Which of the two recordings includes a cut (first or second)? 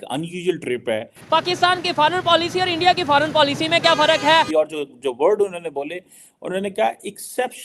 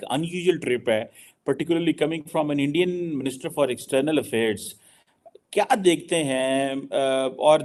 first